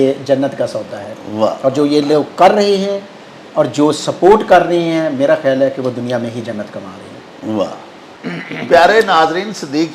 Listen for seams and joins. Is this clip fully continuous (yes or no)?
yes